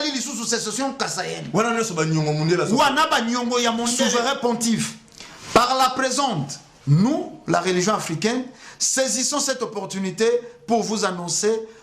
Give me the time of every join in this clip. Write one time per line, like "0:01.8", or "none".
0:04.0